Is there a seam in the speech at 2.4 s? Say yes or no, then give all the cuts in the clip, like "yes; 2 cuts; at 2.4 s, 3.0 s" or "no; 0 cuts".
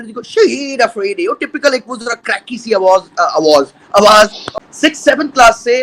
no; 1 cut; at 4.4 s